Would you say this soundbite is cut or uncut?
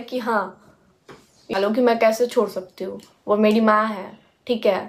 cut